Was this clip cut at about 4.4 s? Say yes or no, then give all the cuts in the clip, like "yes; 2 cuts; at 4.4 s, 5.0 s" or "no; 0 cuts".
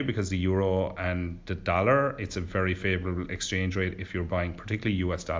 no; 0 cuts